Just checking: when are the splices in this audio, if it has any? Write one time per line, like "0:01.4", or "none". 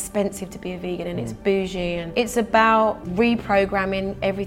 0:02.0
0:03.0